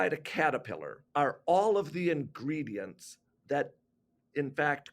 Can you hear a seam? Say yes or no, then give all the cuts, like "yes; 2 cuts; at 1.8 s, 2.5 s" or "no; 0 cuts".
yes; 1 cut; at 0.9 s